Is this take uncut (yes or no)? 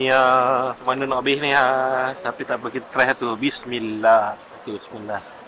yes